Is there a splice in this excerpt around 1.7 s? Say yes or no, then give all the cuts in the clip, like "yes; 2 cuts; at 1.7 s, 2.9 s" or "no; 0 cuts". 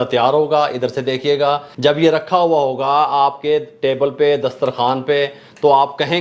yes; 1 cut; at 1.7 s